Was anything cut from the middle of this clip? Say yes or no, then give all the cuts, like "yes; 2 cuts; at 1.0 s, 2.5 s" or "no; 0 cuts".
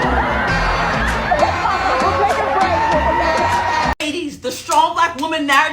yes; 1 cut; at 4.0 s